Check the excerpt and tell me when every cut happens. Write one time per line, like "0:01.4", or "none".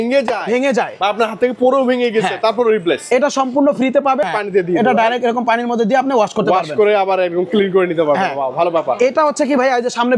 0:04.2

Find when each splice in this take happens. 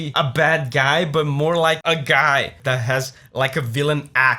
0:02.6

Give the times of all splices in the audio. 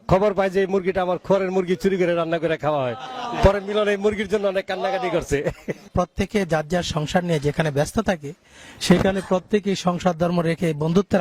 0:05.9

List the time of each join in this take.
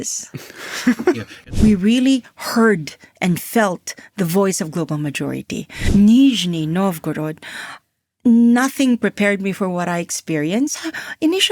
0:01.3
0:05.8

